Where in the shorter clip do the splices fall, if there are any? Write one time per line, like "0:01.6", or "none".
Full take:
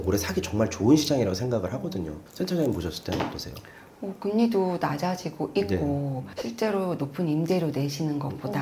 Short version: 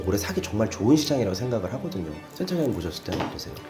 none